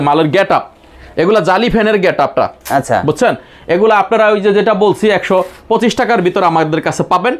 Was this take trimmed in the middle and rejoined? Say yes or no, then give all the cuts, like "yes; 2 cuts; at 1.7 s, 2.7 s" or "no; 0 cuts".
no; 0 cuts